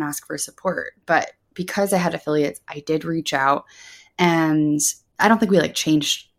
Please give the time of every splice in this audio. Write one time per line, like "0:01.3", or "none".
0:05.0